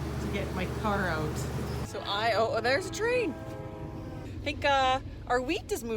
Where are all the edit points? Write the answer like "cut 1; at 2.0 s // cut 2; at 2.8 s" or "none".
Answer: cut 1; at 1.8 s // cut 2; at 4.2 s